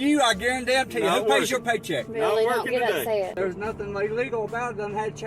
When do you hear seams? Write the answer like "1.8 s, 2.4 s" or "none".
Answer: 3.4 s